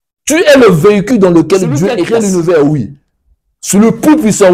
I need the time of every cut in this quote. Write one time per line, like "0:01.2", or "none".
0:02.0